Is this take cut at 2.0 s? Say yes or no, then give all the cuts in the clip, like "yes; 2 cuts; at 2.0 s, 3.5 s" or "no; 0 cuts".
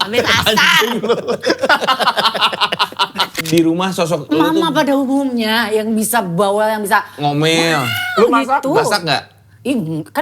no; 1 cut; at 3.3 s